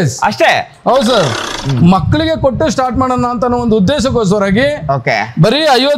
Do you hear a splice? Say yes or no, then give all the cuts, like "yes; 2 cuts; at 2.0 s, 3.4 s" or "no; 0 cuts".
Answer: yes; 1 cut; at 1.5 s